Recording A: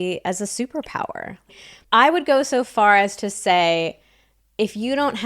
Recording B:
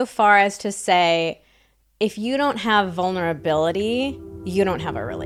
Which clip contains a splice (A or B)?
A